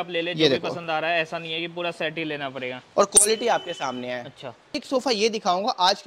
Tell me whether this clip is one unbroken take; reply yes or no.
no